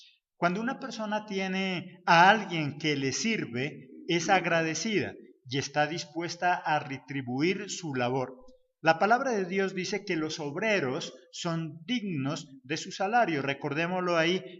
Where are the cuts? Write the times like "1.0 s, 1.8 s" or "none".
none